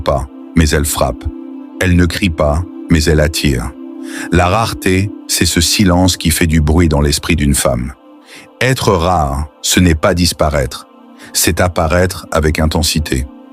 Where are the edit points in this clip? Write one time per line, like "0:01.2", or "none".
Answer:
none